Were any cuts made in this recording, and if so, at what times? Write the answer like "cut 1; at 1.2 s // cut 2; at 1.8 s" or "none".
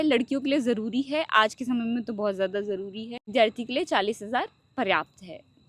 none